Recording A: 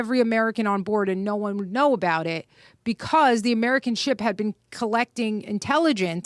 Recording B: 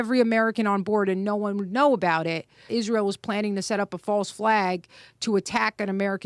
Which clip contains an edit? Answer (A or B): B